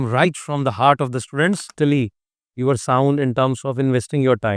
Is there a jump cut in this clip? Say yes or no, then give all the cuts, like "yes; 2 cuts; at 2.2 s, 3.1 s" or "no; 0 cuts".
yes; 1 cut; at 1.7 s